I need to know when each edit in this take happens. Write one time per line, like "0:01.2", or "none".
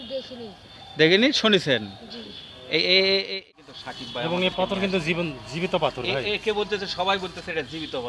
0:03.4